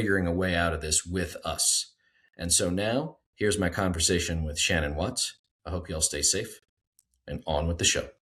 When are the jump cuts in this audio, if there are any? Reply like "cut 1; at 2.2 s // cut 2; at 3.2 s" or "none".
none